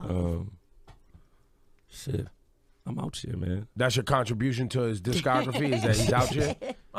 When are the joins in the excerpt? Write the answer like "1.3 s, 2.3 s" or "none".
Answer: none